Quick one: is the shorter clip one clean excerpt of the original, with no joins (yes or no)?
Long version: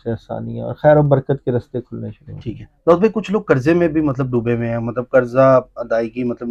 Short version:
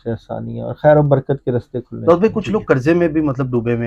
no